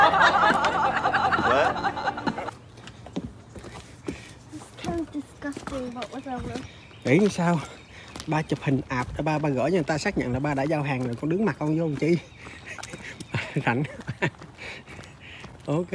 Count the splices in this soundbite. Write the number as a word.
zero